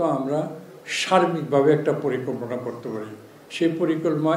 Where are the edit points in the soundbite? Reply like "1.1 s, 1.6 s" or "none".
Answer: none